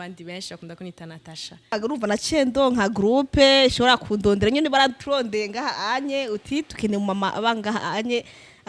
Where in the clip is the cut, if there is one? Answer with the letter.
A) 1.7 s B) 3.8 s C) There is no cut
A